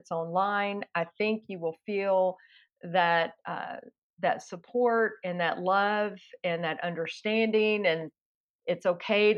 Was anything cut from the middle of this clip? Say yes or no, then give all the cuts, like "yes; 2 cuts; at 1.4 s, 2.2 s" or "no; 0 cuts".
no; 0 cuts